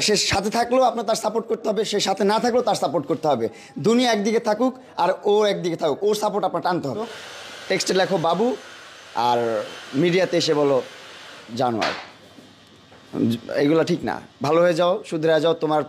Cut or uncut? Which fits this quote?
cut